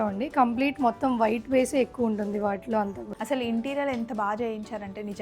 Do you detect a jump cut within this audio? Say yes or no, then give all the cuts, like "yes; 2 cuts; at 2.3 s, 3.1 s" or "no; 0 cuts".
yes; 1 cut; at 3.0 s